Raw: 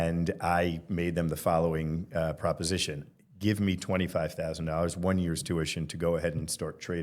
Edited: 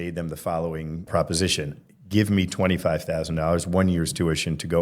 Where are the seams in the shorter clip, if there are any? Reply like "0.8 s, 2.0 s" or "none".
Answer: 1.1 s